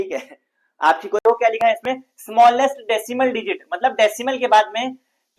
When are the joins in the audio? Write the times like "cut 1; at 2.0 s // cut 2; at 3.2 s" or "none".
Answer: cut 1; at 1.2 s